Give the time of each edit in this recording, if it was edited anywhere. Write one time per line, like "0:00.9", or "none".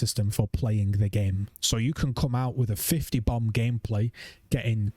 0:01.5